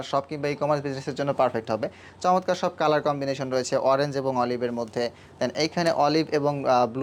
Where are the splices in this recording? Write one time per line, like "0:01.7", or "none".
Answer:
none